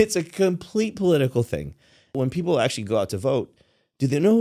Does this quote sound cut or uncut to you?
cut